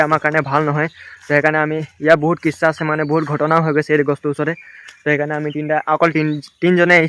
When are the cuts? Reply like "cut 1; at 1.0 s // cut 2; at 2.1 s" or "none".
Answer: none